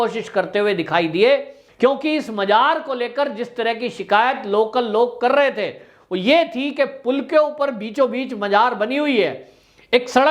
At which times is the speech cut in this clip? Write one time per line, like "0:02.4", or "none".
0:01.6